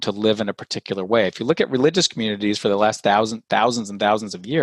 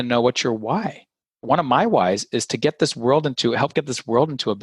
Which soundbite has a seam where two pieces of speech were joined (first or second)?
second